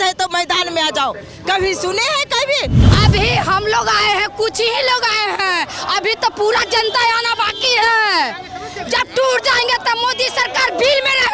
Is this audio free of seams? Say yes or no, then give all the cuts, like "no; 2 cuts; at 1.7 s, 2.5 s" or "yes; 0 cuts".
no; 1 cut; at 2.8 s